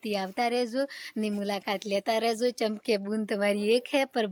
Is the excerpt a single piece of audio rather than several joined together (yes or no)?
yes